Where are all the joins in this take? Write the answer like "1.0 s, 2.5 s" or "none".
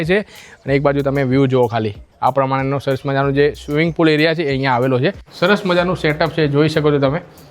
5.3 s